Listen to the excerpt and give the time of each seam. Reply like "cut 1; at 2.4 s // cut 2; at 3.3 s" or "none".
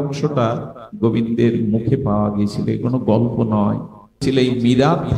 cut 1; at 4.2 s

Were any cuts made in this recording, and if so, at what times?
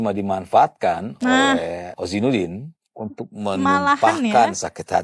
none

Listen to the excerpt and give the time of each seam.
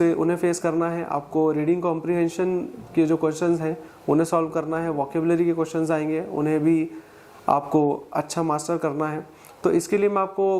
none

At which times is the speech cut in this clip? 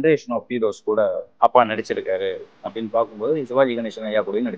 cut 1; at 1.2 s

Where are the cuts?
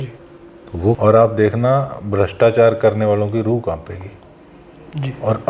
cut 1; at 1.0 s

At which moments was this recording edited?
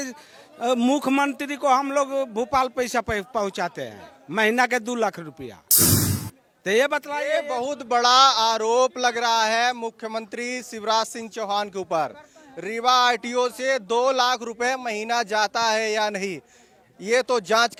none

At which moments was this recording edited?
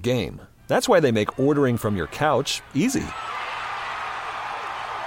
none

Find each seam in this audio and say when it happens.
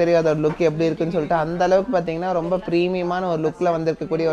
none

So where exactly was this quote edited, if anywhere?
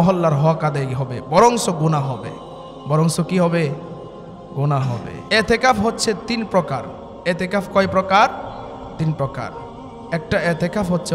cut 1; at 5.2 s

